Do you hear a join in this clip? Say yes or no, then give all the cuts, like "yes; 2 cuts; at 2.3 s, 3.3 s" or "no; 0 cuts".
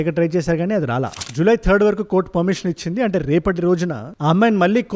yes; 1 cut; at 1.2 s